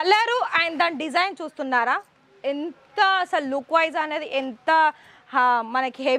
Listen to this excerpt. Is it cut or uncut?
uncut